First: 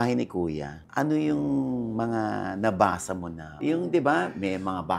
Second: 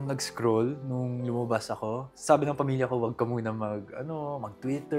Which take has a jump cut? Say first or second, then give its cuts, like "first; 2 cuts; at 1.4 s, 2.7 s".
first; 1 cut; at 3.4 s